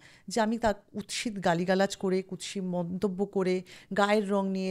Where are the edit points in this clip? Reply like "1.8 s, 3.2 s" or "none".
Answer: none